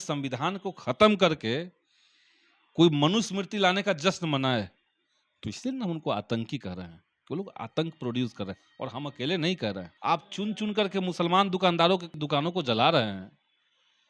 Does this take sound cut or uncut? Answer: cut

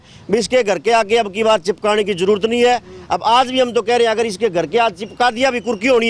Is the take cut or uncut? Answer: uncut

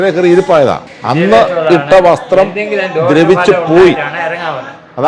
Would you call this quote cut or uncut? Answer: uncut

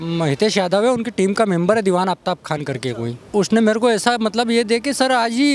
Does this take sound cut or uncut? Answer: cut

